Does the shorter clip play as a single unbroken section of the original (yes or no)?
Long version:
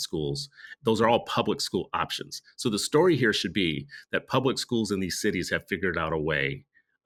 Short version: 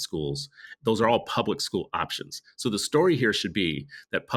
yes